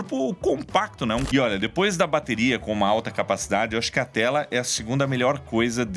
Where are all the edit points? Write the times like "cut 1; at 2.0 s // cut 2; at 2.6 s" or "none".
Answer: cut 1; at 1.2 s